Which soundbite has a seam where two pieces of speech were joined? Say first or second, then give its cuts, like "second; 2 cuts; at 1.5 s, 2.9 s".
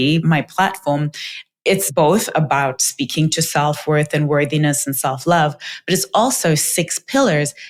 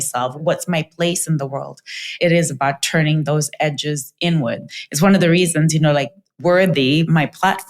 second; 2 cuts; at 2.1 s, 4.7 s